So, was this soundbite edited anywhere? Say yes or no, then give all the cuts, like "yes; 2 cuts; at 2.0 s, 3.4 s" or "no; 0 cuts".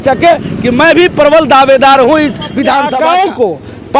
yes; 1 cut; at 2.8 s